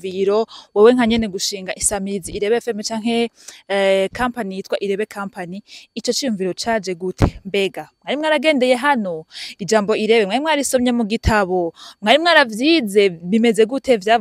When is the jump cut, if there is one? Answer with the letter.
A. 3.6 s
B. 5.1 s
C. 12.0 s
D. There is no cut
D